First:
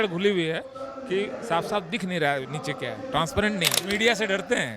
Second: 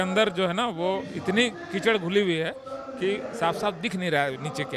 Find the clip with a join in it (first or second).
first